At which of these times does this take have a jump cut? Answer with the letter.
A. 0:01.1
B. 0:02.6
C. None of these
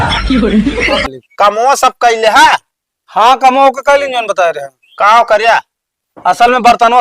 A